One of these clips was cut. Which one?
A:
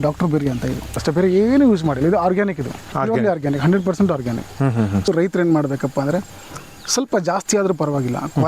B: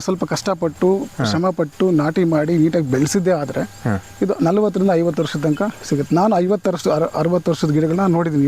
A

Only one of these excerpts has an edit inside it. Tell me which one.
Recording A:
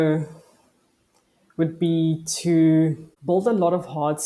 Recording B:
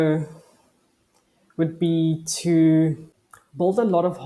A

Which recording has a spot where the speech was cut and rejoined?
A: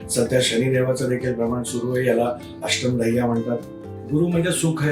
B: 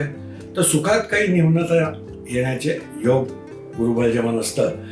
A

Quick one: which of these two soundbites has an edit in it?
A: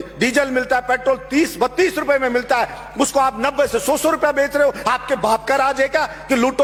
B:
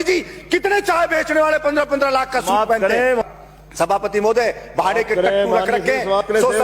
B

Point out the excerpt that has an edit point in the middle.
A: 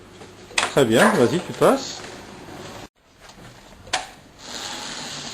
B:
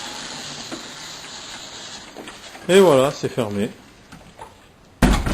A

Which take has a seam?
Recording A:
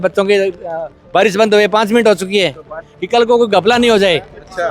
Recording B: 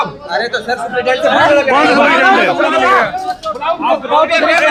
A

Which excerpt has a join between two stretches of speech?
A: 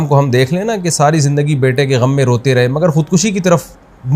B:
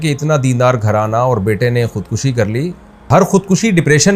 B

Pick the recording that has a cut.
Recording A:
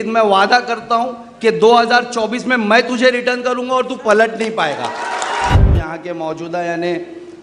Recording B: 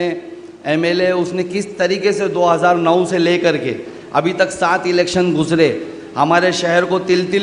A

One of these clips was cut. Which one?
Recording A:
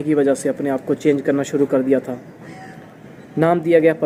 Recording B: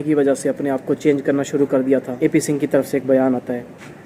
B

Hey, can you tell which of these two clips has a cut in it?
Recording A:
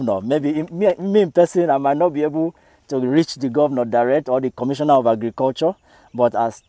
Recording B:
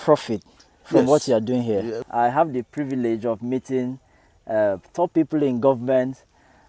B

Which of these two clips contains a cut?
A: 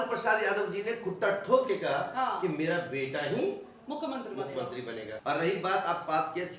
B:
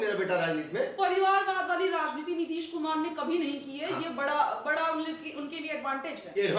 A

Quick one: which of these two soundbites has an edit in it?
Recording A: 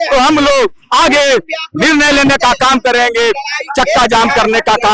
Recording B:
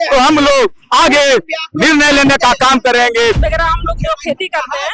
B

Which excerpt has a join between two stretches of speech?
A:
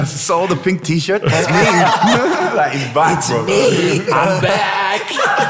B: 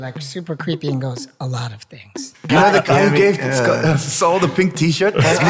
B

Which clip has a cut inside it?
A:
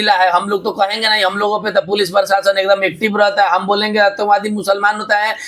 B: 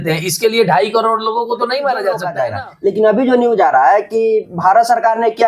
B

